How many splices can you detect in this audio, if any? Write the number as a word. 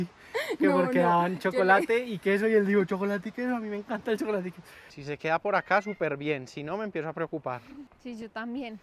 two